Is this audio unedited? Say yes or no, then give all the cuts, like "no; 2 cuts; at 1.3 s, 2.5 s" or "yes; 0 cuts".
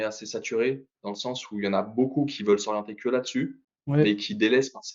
yes; 0 cuts